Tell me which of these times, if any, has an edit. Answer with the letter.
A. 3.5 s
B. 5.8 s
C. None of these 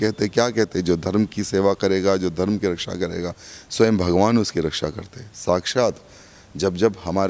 C